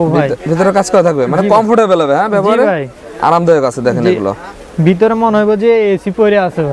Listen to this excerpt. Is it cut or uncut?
uncut